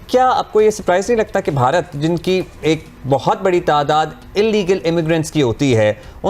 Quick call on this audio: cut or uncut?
uncut